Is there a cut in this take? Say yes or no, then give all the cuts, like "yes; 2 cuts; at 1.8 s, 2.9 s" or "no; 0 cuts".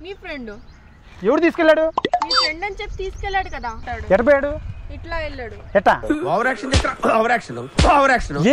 yes; 1 cut; at 3.8 s